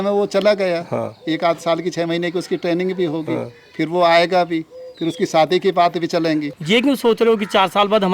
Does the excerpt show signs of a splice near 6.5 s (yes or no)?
yes